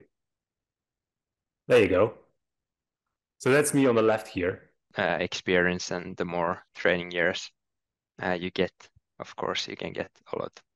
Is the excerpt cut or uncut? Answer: cut